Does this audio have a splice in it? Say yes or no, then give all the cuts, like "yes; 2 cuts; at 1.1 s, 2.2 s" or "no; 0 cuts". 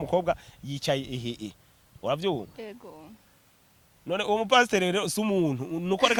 no; 0 cuts